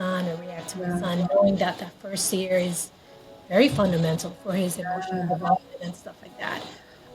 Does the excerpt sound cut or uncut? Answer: uncut